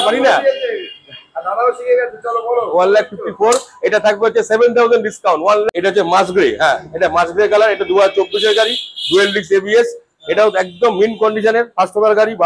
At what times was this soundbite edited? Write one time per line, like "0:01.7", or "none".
0:05.7